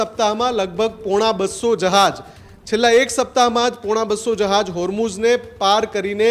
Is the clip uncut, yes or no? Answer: yes